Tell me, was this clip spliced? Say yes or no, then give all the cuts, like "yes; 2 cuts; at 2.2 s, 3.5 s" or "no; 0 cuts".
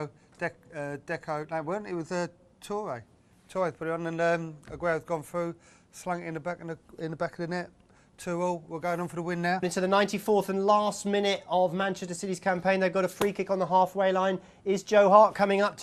no; 0 cuts